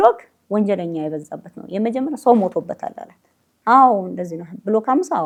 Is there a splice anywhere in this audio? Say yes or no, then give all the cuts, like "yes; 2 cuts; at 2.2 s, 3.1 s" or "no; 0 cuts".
no; 0 cuts